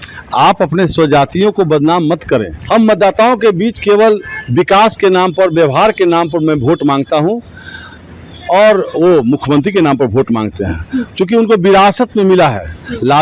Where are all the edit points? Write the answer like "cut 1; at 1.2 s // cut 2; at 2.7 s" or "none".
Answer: cut 1; at 2.5 s